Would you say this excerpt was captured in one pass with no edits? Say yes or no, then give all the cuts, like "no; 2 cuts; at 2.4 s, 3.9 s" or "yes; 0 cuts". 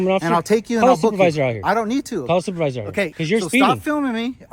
no; 1 cut; at 3.2 s